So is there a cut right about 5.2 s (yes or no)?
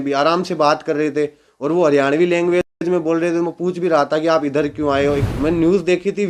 yes